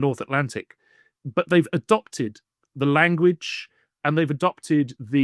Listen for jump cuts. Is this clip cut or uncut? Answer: uncut